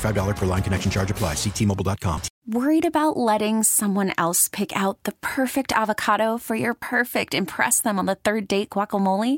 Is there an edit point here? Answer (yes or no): yes